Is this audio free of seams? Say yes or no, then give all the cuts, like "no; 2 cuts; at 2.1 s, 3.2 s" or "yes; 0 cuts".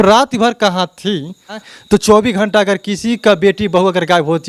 no; 1 cut; at 1.6 s